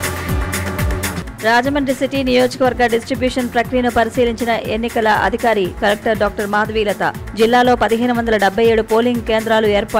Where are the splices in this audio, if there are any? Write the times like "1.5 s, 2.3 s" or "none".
0.9 s